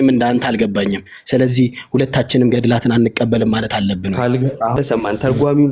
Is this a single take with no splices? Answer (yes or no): no